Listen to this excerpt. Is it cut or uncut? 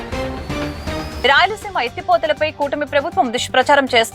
cut